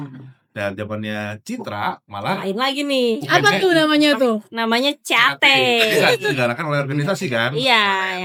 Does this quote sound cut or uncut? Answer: uncut